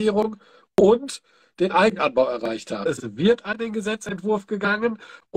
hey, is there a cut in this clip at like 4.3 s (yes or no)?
no